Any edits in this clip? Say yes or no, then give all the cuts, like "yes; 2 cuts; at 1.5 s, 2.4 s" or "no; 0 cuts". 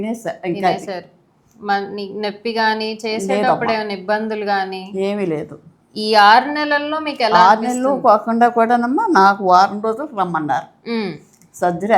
no; 0 cuts